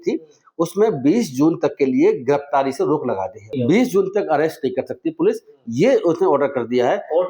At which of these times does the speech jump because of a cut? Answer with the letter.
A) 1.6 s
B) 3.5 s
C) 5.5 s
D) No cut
B